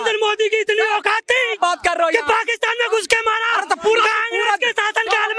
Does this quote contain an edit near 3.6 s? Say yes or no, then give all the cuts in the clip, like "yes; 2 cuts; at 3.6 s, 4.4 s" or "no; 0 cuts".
no; 0 cuts